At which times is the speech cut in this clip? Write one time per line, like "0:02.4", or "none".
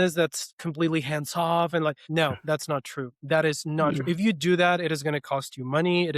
0:02.0